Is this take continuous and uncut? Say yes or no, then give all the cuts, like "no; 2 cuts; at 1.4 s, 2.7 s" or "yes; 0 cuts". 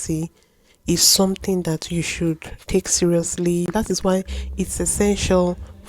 no; 1 cut; at 3.7 s